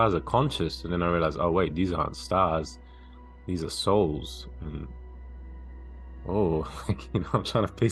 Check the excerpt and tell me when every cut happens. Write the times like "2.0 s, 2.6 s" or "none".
none